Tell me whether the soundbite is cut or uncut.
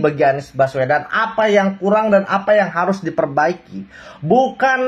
uncut